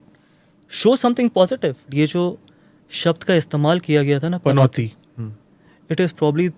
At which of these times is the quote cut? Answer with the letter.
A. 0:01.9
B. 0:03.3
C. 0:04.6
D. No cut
A